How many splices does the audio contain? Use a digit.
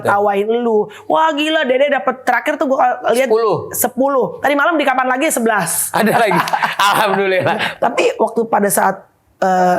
1